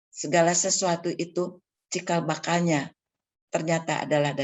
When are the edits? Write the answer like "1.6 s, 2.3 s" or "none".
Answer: none